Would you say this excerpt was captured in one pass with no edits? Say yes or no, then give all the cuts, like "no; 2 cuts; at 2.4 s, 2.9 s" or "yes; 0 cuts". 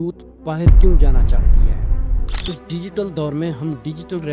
no; 1 cut; at 2.3 s